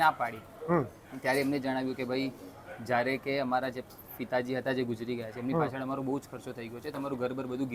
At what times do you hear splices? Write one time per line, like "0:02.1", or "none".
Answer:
none